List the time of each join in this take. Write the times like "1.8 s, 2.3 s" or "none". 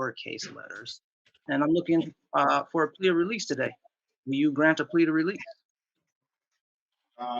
1.4 s